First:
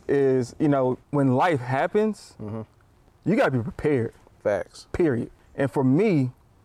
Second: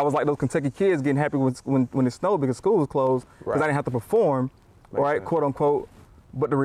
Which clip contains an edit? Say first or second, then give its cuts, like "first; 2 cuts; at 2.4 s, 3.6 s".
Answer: first; 2 cuts; at 1.0 s, 5.4 s